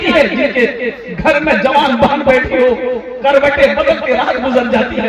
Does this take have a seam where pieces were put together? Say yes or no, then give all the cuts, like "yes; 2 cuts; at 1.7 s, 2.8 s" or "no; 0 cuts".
no; 0 cuts